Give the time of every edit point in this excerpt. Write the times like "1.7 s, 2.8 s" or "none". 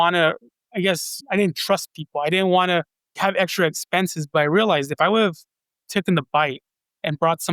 1.1 s, 3.1 s